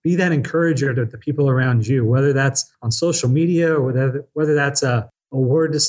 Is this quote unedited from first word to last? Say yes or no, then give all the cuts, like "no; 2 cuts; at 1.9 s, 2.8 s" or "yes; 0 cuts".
yes; 0 cuts